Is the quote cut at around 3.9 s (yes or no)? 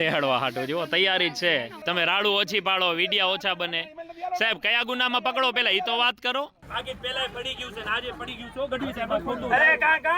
no